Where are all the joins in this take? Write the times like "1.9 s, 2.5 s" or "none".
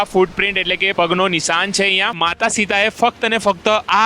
2.2 s

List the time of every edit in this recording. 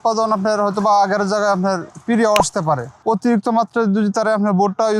2.9 s

